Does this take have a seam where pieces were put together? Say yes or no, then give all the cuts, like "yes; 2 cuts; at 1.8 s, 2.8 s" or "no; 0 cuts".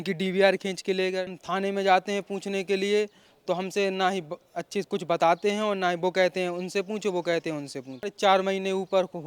yes; 2 cuts; at 1.4 s, 8.1 s